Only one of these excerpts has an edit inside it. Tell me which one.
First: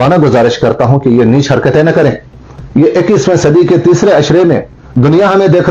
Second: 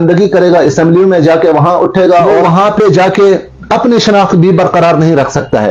second; 1 cut; at 2.3 s

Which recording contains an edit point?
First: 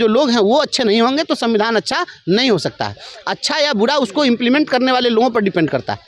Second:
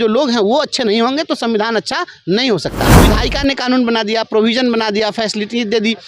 second; 1 cut; at 3.0 s

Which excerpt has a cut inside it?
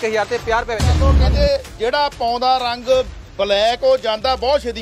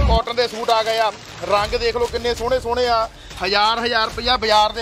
first; 1 cut; at 1.0 s

